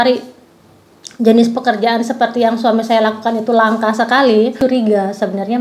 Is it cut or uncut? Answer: cut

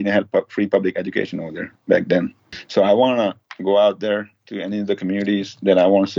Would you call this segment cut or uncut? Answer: uncut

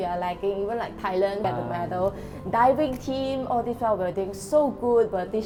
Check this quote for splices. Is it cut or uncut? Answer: uncut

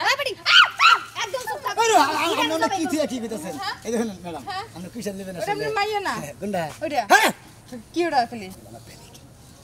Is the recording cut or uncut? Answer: uncut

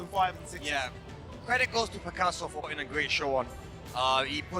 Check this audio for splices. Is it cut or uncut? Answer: cut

